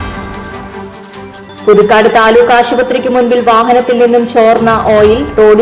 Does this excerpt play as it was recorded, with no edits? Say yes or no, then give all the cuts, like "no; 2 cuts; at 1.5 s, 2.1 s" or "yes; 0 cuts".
no; 1 cut; at 1.3 s